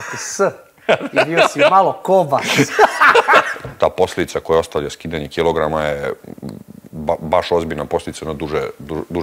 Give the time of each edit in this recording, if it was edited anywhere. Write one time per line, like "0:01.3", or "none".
0:03.6